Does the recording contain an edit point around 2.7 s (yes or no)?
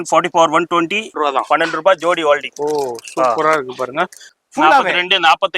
no